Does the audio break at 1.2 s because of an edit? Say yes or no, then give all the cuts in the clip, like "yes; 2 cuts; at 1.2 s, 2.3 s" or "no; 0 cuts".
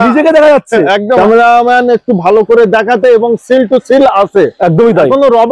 yes; 1 cut; at 1.2 s